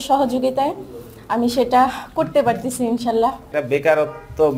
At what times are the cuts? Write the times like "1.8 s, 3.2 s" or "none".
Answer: 3.4 s